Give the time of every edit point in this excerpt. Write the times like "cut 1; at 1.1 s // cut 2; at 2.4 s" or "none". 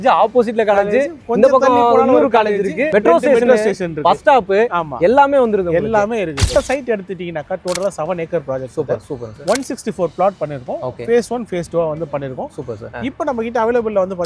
cut 1; at 6.4 s // cut 2; at 12.9 s